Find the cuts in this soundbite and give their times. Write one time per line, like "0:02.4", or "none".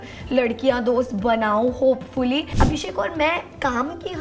0:02.5